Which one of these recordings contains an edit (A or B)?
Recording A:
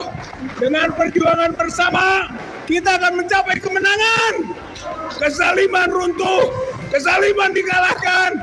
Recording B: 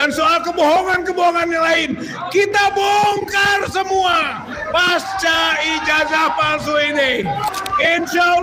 B